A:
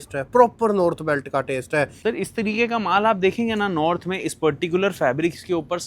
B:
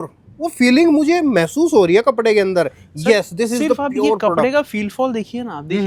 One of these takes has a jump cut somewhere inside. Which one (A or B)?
A